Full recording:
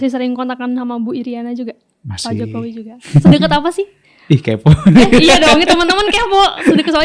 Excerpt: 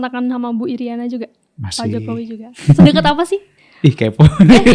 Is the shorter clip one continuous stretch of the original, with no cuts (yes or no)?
yes